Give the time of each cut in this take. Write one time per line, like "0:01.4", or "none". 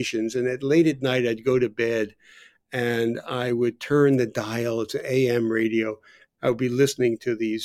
0:06.2